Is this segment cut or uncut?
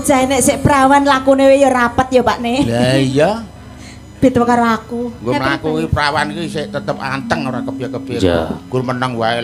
uncut